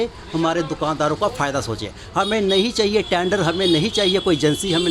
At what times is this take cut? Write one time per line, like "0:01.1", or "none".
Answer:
none